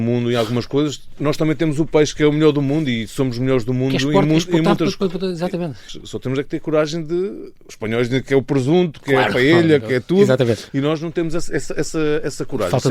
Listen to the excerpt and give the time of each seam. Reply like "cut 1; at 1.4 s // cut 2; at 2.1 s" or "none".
cut 1; at 1.1 s // cut 2; at 5.9 s